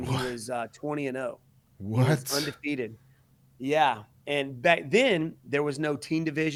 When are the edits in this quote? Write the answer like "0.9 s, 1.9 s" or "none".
none